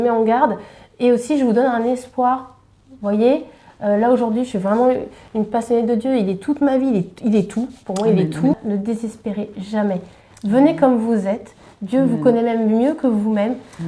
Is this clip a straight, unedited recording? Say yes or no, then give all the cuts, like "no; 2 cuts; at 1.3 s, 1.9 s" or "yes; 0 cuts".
no; 1 cut; at 8.6 s